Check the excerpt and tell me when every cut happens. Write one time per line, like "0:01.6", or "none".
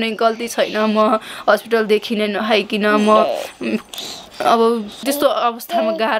0:05.0